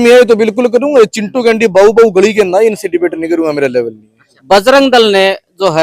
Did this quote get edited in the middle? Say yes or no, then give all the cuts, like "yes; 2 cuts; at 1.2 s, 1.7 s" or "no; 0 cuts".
yes; 1 cut; at 4.3 s